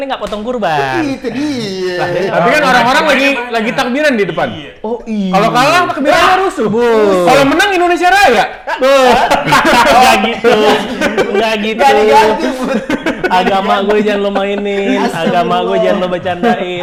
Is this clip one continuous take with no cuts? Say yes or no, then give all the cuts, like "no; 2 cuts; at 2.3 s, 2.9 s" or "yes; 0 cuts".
yes; 0 cuts